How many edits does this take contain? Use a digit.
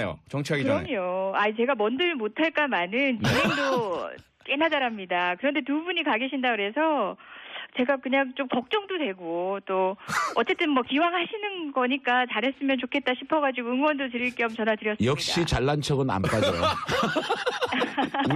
1